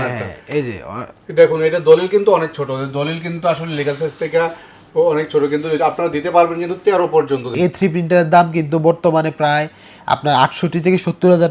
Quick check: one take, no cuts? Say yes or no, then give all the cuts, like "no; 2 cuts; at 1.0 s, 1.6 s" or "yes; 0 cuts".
no; 1 cut; at 7.5 s